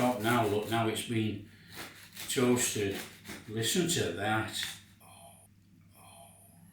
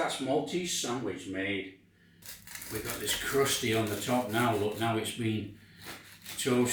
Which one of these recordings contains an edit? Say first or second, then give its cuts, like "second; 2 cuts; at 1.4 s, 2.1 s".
first; 1 cut; at 5.3 s